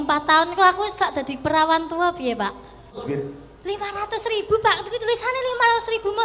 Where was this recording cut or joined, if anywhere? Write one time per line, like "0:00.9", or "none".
0:02.9